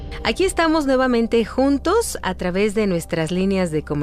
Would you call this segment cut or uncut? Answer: cut